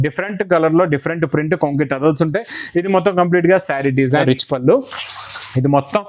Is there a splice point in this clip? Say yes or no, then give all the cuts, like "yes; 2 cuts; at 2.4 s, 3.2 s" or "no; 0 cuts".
yes; 1 cut; at 4.2 s